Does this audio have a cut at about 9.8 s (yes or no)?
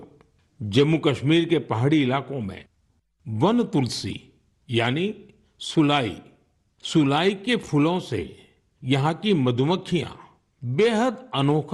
yes